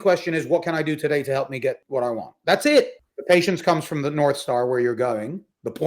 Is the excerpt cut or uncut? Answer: cut